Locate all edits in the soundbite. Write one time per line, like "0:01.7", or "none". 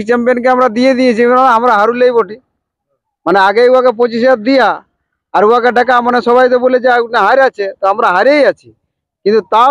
none